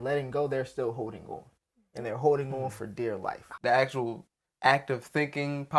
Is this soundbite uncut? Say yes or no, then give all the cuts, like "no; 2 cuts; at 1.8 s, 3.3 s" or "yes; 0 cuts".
no; 1 cut; at 3.5 s